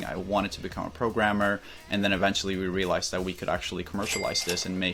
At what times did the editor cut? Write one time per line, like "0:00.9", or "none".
none